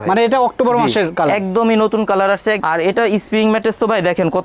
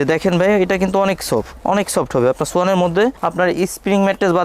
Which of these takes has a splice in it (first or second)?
first